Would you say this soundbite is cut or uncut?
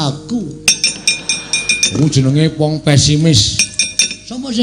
cut